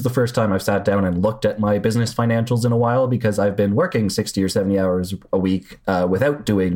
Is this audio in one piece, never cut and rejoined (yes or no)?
yes